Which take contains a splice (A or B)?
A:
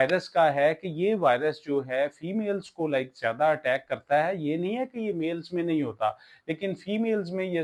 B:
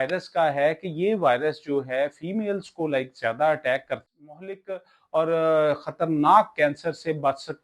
B